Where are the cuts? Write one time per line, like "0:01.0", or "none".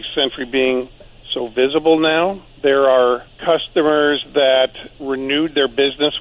0:02.5
0:03.3
0:04.9